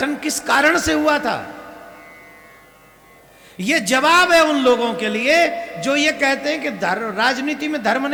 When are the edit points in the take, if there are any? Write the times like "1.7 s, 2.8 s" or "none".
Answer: none